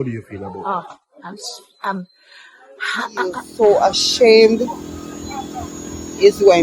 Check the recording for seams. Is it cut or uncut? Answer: cut